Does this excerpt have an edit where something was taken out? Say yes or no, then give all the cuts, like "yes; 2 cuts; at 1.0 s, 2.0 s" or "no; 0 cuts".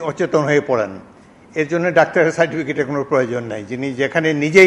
no; 0 cuts